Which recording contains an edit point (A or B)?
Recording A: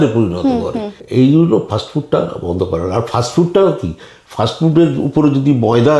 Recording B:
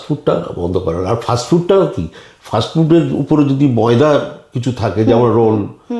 A